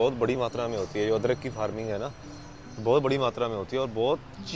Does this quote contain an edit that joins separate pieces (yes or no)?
no